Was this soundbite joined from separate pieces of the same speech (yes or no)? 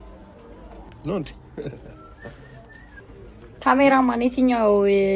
no